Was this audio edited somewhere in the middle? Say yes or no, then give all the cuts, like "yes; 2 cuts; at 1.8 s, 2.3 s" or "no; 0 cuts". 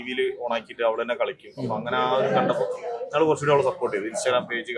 no; 0 cuts